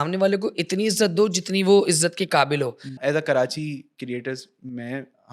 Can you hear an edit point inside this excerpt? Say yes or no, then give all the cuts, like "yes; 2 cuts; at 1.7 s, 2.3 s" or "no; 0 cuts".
yes; 1 cut; at 3.0 s